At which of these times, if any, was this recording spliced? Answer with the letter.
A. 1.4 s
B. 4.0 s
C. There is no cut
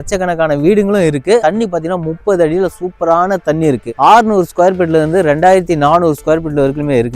B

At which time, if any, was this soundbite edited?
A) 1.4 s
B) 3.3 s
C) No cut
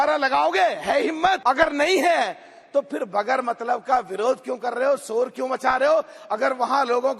A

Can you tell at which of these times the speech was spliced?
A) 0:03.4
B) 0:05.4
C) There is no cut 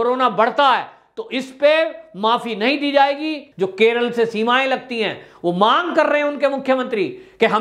A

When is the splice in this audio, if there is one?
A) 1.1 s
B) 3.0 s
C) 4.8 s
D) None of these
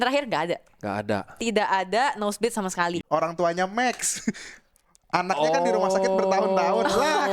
B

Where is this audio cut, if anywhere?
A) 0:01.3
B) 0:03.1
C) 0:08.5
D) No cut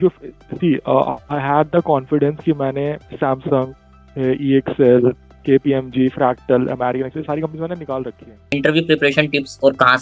C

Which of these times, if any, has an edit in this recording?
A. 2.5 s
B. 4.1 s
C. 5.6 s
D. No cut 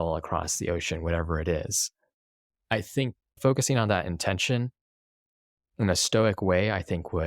C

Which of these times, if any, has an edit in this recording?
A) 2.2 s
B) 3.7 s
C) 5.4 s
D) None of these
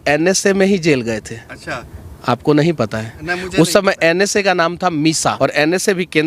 C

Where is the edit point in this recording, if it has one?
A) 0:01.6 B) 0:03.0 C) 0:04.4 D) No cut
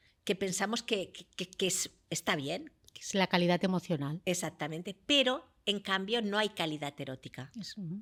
D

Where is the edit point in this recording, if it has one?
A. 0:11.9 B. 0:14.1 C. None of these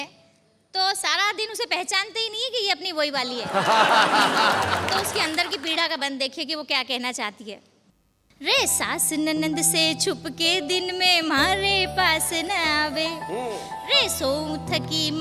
C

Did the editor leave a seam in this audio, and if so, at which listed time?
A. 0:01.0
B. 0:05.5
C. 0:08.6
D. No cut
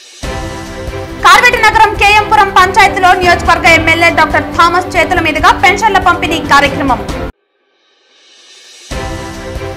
A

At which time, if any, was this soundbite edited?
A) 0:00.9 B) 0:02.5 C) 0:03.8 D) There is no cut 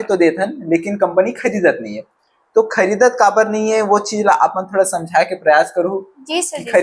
D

